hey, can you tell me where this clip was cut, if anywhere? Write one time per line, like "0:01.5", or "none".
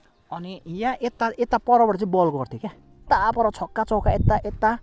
0:03.0